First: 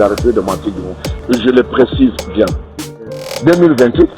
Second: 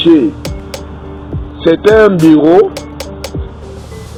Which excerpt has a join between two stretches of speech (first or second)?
first